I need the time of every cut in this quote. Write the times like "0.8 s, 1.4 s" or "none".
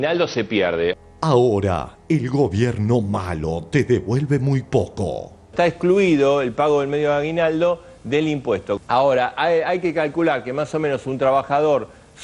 1.0 s